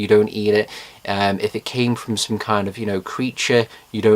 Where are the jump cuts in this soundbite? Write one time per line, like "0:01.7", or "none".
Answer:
0:01.7